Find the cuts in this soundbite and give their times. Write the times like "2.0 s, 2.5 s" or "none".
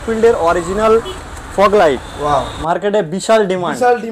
2.1 s